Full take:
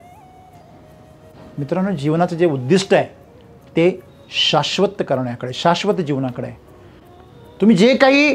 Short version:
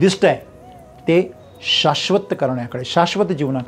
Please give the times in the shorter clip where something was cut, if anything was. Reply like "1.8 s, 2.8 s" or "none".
none